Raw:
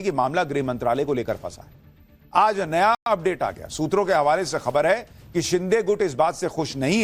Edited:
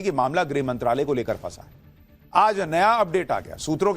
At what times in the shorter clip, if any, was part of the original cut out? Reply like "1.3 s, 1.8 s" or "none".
3.0 s

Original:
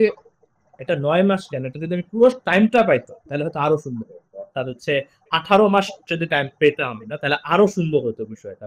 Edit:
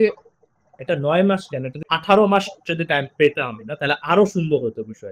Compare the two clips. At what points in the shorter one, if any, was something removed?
1.8 s

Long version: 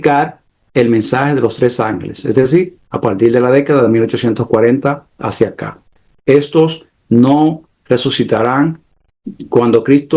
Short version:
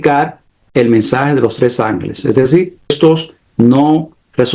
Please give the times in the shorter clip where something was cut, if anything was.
2.9 s

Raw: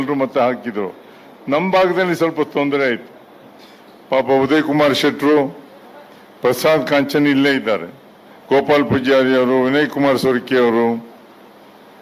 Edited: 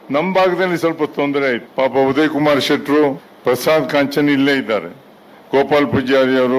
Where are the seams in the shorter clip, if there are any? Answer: 1.7 s, 3.3 s

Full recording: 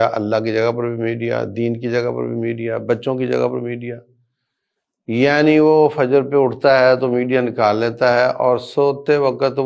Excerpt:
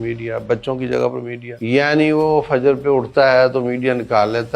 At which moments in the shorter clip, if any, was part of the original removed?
1.4 s

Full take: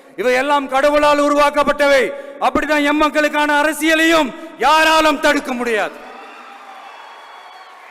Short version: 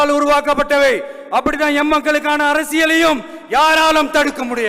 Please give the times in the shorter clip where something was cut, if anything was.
none

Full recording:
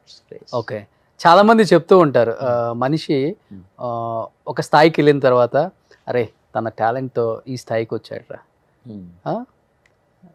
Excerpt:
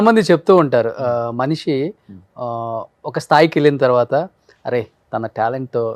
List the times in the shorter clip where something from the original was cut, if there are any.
none

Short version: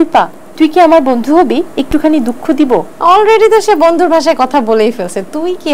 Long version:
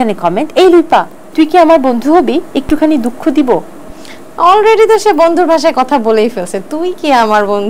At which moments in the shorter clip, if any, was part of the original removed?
2.9 s

